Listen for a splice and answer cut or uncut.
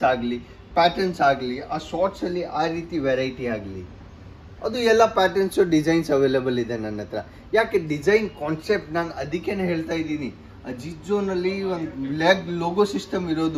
uncut